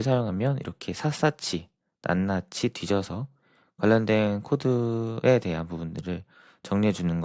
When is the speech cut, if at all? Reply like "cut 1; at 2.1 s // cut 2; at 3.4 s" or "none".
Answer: none